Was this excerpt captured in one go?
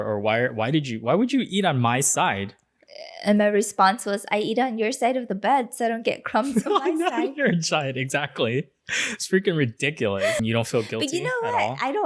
no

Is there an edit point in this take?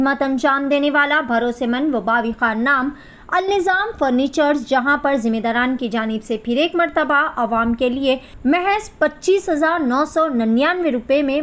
yes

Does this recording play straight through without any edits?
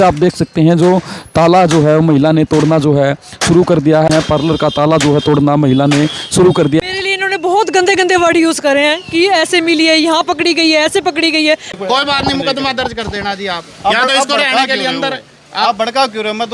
no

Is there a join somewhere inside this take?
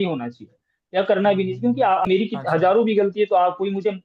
yes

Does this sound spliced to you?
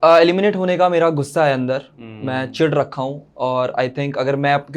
no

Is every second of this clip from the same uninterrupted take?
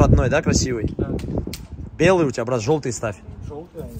yes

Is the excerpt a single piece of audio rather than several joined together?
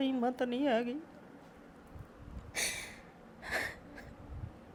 yes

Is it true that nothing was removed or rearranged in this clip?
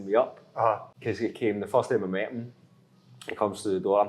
no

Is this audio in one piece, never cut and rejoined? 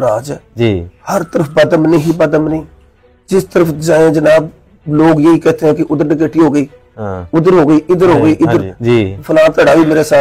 no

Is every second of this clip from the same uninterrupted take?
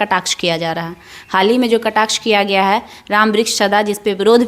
yes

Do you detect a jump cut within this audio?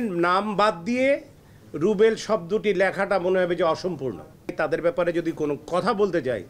yes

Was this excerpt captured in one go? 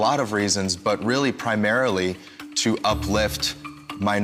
yes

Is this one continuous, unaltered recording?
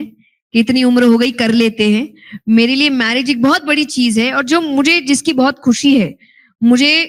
yes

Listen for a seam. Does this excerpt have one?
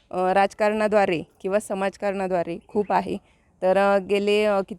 no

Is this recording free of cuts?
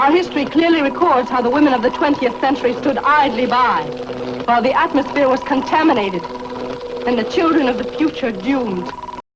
yes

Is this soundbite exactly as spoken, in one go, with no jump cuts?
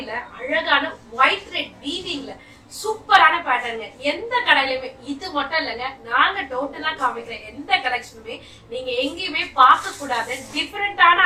yes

